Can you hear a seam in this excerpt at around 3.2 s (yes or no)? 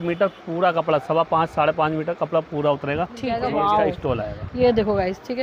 yes